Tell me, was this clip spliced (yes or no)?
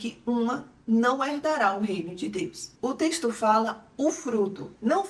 yes